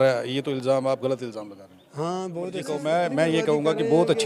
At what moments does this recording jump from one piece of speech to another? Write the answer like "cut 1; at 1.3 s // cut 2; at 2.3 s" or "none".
cut 1; at 2.6 s